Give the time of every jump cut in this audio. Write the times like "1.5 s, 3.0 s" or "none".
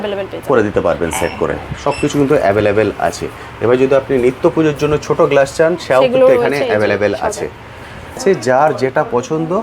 8.2 s